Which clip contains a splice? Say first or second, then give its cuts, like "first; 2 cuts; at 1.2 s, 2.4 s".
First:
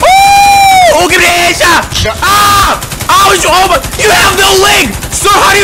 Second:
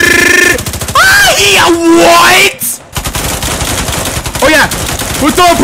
second; 1 cut; at 2.9 s